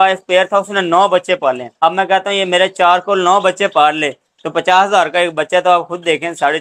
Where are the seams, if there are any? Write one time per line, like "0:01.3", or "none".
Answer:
0:01.7